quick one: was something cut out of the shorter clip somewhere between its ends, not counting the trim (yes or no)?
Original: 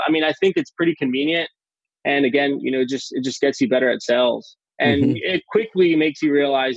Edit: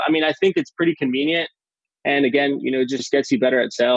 yes